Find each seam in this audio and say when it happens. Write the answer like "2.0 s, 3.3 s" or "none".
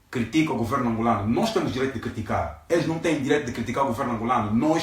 none